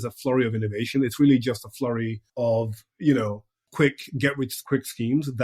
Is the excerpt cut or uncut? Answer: cut